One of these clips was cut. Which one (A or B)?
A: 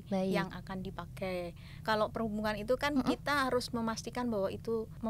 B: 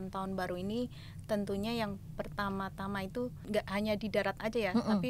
A